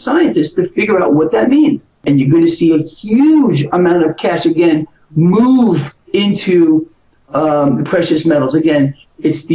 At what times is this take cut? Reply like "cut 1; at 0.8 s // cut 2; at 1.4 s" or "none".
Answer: cut 1; at 1.9 s